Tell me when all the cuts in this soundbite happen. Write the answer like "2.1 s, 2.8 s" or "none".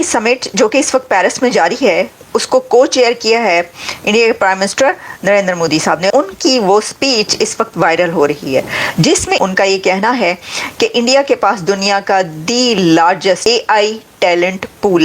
6.1 s, 9.4 s, 13.4 s